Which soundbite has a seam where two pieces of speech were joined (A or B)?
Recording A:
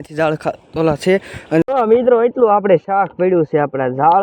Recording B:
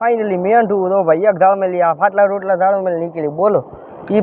A